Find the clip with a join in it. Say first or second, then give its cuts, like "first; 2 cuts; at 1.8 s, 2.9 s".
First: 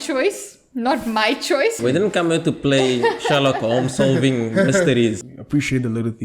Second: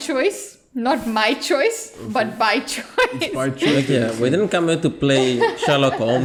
first; 2 cuts; at 1.8 s, 5.3 s